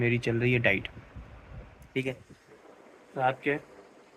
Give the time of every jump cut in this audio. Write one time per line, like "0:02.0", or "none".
none